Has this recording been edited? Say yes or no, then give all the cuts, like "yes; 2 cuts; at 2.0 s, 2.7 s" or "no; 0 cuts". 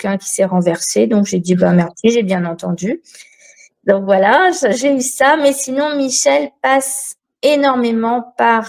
no; 0 cuts